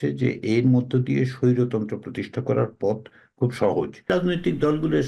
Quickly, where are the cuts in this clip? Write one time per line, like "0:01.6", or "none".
0:04.1